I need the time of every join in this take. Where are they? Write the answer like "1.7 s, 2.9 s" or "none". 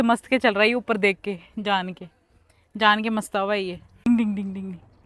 4.1 s

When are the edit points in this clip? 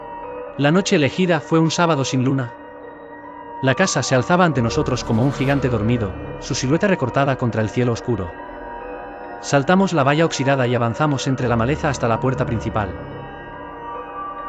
13.0 s

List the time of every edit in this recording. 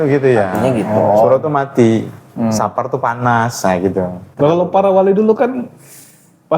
4.2 s

